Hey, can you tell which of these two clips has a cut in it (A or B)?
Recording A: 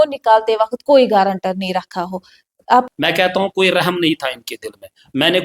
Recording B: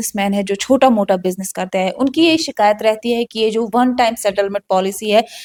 A